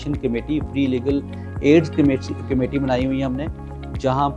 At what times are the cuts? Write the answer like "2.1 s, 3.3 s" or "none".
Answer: none